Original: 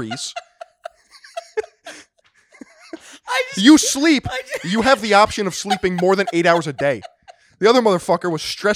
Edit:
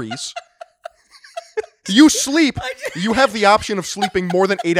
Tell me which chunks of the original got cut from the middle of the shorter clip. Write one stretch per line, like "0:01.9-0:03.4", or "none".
0:01.8-0:03.5